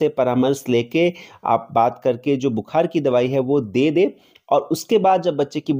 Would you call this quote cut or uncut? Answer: uncut